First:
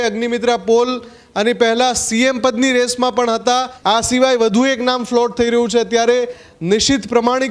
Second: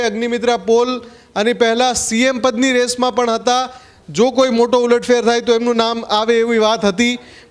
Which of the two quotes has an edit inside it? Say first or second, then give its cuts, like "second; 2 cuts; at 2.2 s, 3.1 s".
first; 1 cut; at 3.7 s